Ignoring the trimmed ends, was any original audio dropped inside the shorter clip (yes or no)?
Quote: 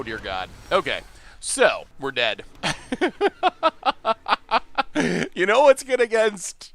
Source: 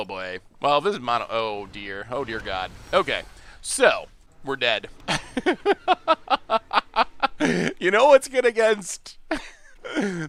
yes